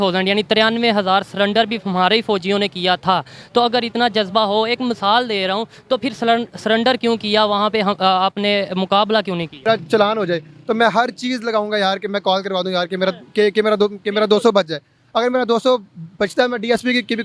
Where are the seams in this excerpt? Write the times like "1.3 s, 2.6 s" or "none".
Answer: 9.6 s